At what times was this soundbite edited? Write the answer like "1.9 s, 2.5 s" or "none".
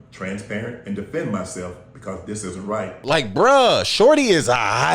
3.0 s